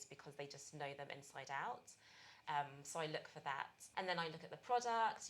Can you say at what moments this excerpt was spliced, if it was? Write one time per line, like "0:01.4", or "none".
0:03.8